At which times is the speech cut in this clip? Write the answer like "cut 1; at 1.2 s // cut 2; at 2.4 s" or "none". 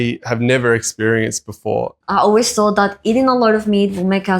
cut 1; at 2.0 s